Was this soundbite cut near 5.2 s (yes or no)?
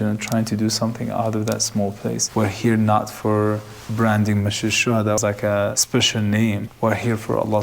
yes